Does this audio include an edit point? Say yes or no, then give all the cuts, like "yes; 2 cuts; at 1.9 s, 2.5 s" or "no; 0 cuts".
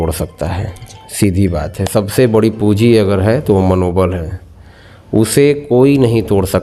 no; 0 cuts